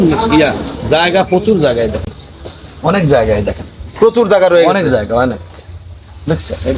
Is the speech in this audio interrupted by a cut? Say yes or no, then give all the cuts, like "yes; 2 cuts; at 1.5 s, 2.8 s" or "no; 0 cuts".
no; 0 cuts